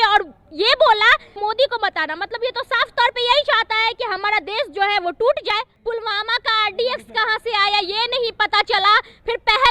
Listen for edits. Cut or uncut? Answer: cut